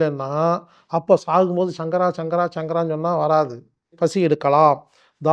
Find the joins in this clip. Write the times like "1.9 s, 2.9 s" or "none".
3.9 s